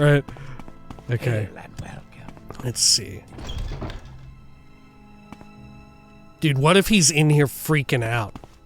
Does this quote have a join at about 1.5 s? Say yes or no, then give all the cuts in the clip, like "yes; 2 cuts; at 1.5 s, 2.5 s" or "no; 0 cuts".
yes; 1 cut; at 1.5 s